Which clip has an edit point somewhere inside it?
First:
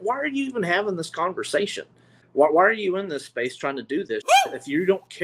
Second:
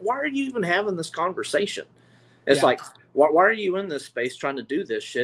first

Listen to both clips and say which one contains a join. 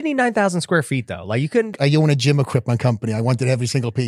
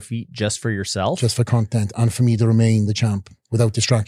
first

